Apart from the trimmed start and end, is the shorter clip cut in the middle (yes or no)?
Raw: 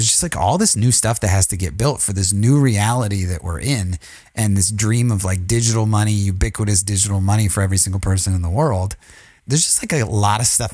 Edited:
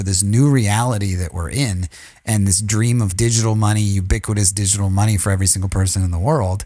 yes